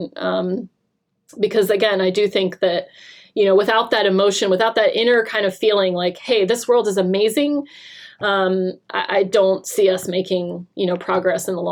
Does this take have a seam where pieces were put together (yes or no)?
no